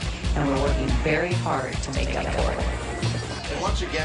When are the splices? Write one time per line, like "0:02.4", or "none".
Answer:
0:02.9